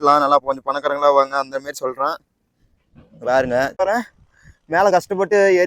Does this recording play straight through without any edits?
no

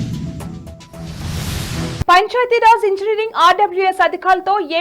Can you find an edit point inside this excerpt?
yes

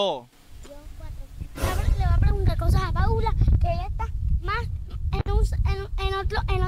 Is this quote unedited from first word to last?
yes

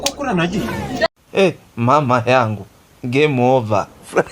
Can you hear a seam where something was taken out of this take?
yes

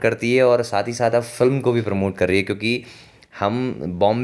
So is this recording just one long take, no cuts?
yes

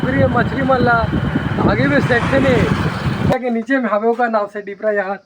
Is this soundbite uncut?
no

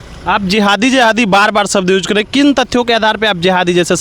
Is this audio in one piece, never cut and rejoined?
yes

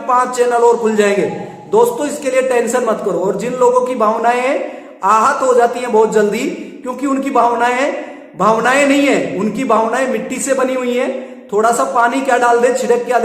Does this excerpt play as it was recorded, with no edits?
yes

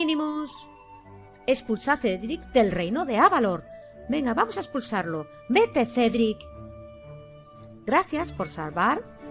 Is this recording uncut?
yes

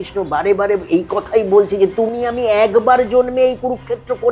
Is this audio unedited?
yes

